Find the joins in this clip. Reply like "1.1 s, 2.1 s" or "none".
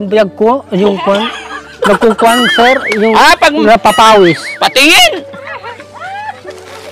none